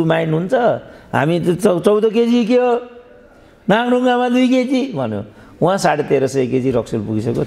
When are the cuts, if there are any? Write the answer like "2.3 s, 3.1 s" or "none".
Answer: none